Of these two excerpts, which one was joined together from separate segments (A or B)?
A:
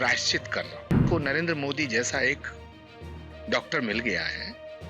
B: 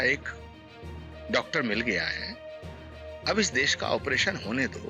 A